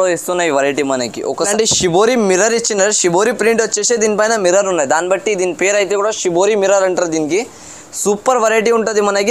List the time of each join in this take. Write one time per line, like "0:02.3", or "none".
0:01.5

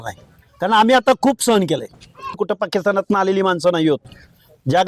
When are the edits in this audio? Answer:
0:02.4

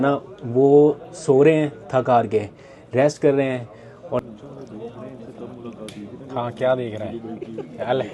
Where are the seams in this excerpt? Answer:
0:04.2

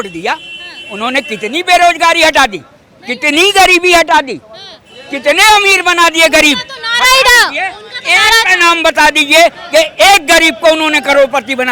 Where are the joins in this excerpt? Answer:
none

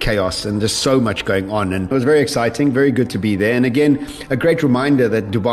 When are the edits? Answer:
0:01.9

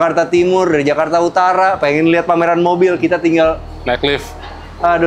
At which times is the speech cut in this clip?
none

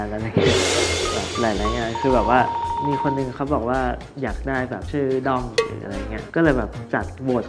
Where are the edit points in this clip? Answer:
0:02.8

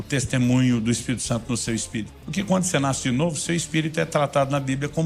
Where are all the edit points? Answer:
0:02.2

